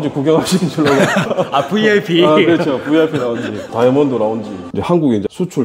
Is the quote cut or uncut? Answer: cut